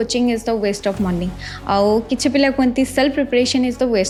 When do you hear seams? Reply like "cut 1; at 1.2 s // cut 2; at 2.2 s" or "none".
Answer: none